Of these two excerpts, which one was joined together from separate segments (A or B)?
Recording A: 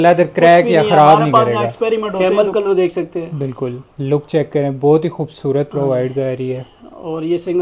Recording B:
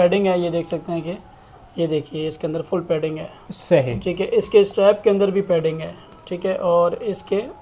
A